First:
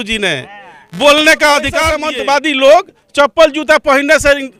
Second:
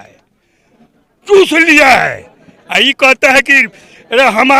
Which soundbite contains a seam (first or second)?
first